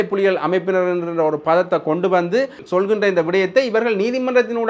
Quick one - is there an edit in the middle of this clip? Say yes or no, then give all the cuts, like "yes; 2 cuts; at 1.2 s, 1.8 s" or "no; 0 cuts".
yes; 1 cut; at 2.6 s